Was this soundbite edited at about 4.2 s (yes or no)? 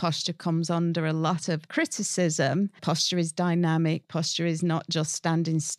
no